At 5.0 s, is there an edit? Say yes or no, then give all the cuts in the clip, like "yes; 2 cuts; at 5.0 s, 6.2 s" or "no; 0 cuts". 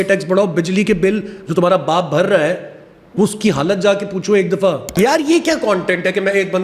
yes; 1 cut; at 5.0 s